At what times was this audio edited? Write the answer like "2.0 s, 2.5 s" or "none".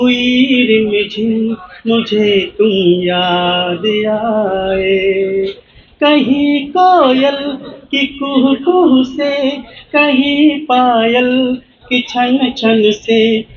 none